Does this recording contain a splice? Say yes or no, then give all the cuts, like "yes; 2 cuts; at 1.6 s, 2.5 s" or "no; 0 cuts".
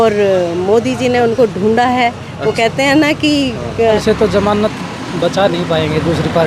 yes; 1 cut; at 4.0 s